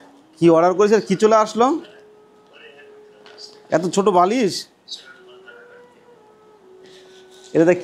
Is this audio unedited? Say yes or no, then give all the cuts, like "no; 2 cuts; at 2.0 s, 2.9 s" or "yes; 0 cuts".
yes; 0 cuts